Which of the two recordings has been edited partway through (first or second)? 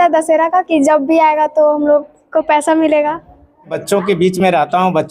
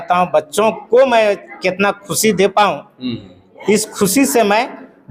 first